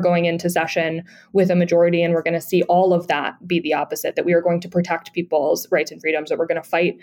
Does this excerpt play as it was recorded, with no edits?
yes; 0 cuts

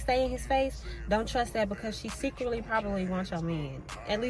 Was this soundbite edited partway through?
no; 0 cuts

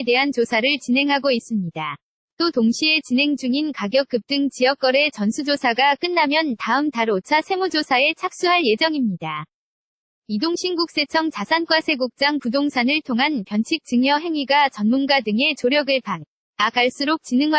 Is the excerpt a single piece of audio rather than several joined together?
yes; 0 cuts

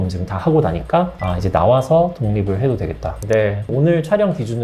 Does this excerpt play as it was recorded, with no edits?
no; 1 cut; at 3.2 s

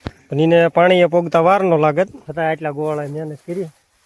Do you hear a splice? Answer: yes; 1 cut; at 2.2 s

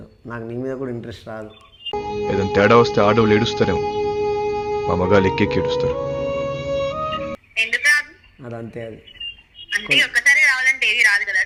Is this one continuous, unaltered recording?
yes; 0 cuts

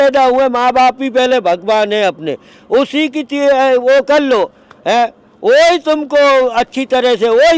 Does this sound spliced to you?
no; 0 cuts

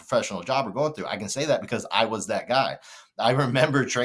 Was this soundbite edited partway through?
no; 0 cuts

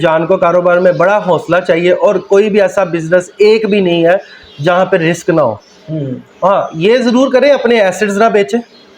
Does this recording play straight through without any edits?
yes; 0 cuts

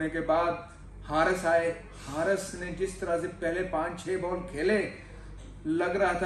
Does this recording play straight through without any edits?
yes; 0 cuts

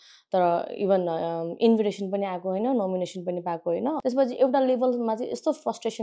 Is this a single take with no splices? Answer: no; 1 cut; at 4.0 s

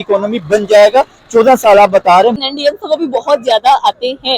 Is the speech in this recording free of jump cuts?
no; 1 cut; at 2.5 s

